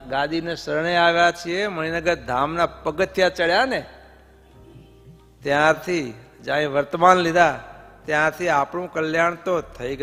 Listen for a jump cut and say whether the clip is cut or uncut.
uncut